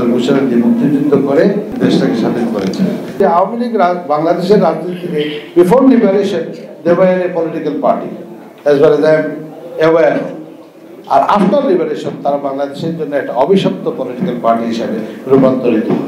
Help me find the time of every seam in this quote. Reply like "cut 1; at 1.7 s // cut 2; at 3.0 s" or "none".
cut 1; at 1.7 s // cut 2; at 3.2 s